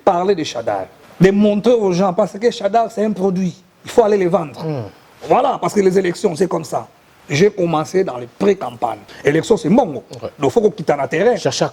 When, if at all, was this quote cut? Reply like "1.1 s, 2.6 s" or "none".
1.0 s, 9.1 s